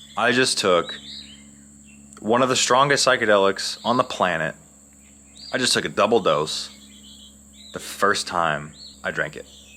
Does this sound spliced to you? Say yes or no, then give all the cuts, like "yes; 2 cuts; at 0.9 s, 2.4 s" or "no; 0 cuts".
yes; 1 cut; at 8.8 s